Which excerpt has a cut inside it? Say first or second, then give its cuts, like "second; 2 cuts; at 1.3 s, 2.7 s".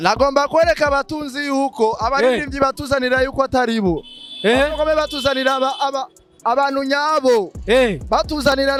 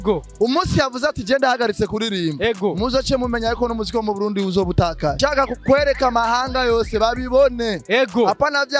second; 1 cut; at 5.2 s